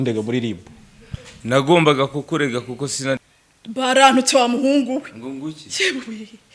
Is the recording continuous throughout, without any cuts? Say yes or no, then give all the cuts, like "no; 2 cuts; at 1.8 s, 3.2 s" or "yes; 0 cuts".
no; 1 cut; at 3.2 s